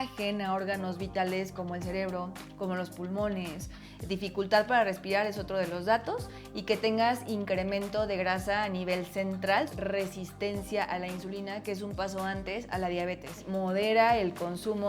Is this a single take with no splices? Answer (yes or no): no